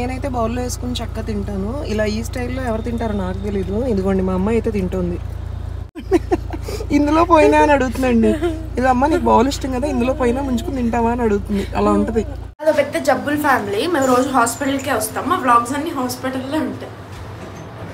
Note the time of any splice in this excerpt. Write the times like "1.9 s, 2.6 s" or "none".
12.6 s